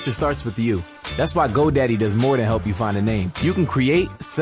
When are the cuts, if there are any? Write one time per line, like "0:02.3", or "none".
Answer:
0:01.5
0:03.3

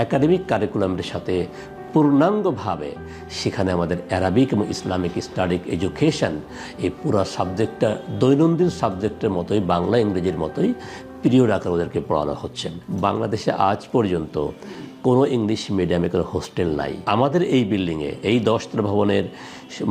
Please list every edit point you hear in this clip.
0:17.0

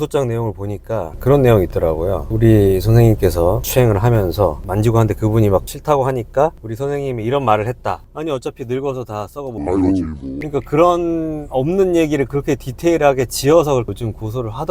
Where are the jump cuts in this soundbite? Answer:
0:08.0
0:10.3

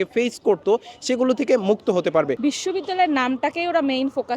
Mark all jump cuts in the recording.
0:02.4

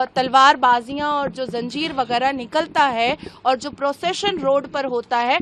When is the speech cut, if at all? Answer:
none

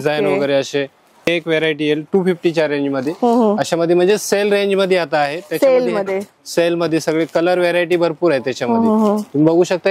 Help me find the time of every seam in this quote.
0:01.2

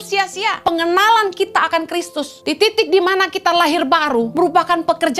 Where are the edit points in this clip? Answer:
0:00.7
0:02.3
0:04.3

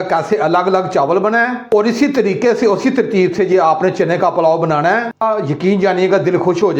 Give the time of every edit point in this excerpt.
0:05.2

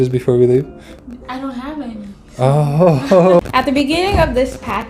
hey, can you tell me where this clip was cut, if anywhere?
0:03.4

